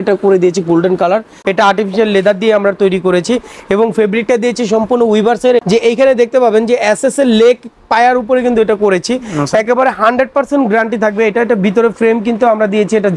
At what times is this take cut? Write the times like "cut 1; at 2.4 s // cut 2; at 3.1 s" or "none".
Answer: cut 1; at 1.3 s // cut 2; at 5.6 s